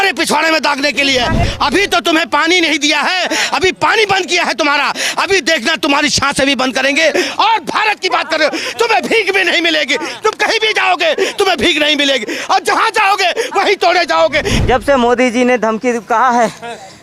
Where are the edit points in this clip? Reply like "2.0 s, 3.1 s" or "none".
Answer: 1.4 s, 14.5 s